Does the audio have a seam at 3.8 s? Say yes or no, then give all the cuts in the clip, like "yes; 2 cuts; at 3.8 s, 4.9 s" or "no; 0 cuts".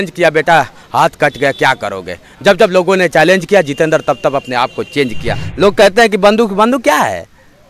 no; 1 cut; at 5.4 s